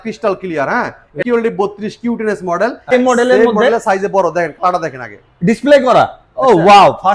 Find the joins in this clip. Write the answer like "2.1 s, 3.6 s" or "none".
1.2 s, 2.9 s